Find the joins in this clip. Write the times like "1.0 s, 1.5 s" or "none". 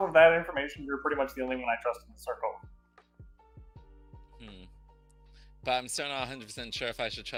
none

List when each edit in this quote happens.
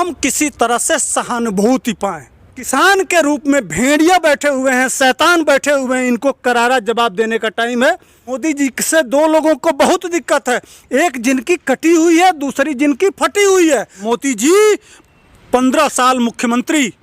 2.7 s, 8.4 s, 14.0 s

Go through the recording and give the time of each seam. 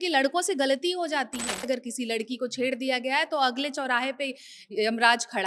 1.7 s

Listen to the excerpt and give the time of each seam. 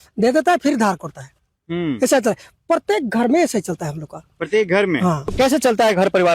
5.3 s

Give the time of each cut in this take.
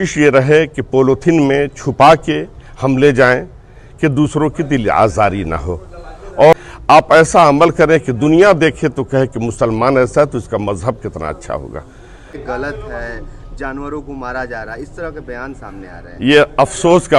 6.5 s, 12.4 s

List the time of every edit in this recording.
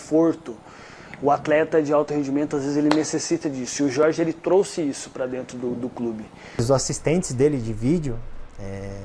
6.6 s

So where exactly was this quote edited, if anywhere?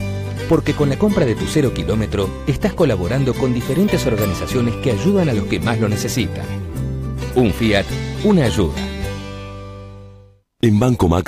none

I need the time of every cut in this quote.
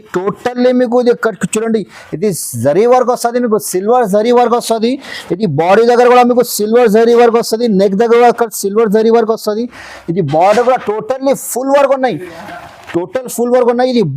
none

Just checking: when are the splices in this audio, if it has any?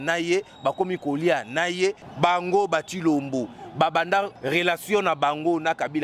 2.1 s, 4.4 s

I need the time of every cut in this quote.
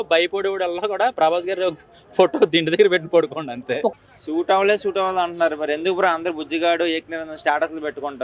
3.9 s

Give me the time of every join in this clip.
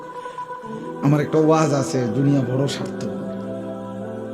2.8 s

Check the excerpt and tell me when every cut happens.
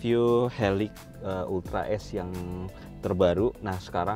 none

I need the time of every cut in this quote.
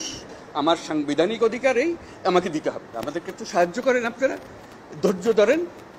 2.9 s

